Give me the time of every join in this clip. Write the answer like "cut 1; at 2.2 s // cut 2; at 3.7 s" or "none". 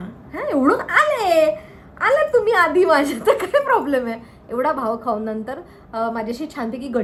none